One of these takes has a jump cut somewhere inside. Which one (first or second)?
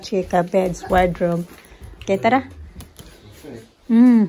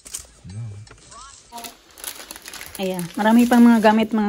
second